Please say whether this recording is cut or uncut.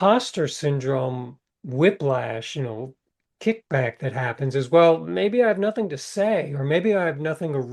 uncut